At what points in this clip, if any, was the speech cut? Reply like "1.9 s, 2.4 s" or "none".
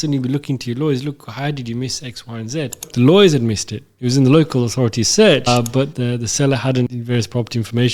2.9 s, 5.5 s, 6.9 s